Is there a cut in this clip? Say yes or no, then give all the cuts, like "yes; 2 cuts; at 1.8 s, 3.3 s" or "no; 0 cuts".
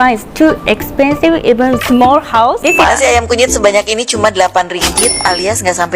yes; 1 cut; at 2.8 s